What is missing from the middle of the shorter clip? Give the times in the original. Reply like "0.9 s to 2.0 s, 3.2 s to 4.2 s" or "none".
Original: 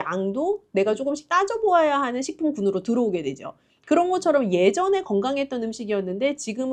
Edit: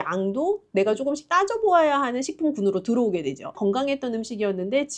3.6 s to 5.1 s